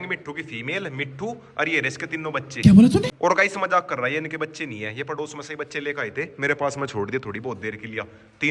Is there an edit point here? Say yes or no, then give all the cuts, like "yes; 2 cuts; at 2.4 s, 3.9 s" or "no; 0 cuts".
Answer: no; 0 cuts